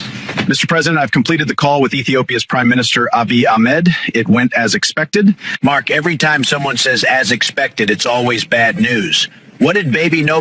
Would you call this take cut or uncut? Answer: uncut